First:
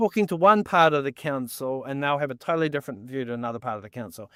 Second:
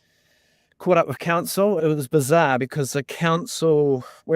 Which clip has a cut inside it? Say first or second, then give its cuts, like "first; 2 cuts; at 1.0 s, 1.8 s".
second; 1 cut; at 1.8 s